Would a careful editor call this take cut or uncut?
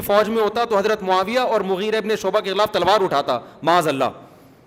uncut